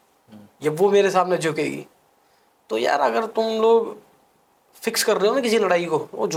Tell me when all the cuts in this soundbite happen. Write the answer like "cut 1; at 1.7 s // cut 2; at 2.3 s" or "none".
none